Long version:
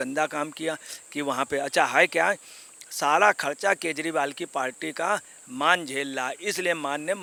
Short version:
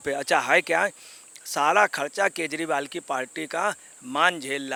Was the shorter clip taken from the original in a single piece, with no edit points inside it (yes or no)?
yes